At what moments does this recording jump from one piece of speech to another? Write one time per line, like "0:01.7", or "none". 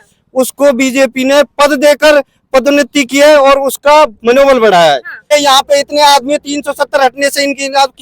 0:05.2